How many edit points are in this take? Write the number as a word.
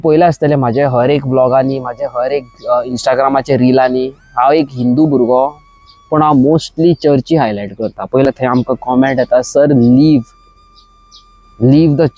one